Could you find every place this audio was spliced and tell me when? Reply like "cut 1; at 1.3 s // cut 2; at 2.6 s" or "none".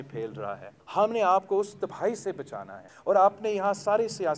none